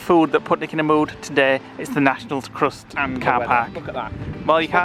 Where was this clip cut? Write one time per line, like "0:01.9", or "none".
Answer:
none